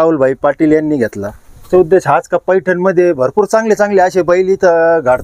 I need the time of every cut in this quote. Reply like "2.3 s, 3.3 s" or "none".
1.7 s

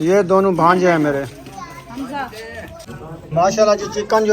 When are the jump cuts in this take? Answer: 2.9 s

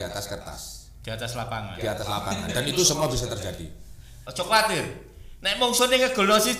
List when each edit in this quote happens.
4.2 s

